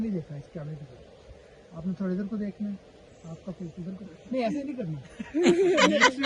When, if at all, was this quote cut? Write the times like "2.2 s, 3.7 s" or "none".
5.2 s